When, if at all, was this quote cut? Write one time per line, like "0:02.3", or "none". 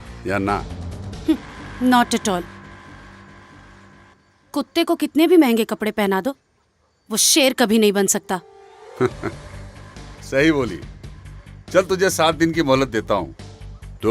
0:04.1